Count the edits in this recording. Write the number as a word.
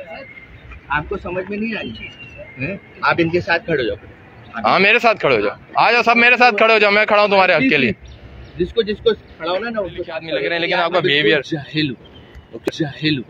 zero